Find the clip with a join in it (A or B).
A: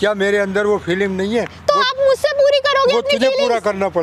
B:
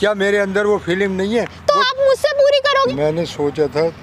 B